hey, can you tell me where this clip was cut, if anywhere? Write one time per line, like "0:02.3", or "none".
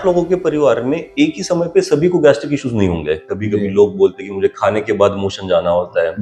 0:03.3